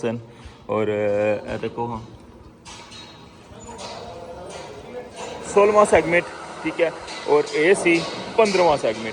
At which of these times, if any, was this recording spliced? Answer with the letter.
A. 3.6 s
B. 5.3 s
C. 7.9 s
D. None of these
B